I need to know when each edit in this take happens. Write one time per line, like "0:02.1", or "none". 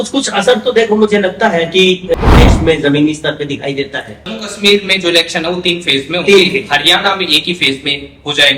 0:04.3